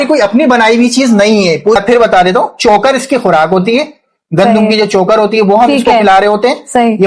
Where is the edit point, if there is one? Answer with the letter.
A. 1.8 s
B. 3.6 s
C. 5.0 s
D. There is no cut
A